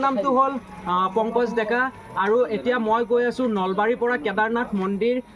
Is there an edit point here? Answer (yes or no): no